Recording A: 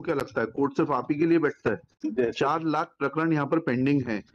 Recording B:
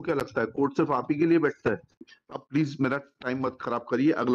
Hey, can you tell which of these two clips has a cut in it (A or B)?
B